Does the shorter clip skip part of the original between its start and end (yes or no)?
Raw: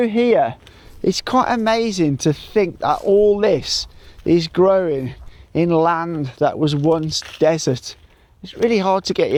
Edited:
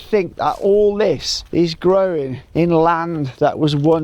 yes